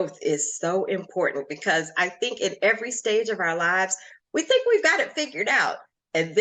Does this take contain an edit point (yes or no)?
no